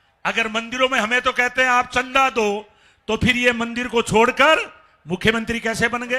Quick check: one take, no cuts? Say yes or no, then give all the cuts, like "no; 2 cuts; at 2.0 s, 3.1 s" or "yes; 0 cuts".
yes; 0 cuts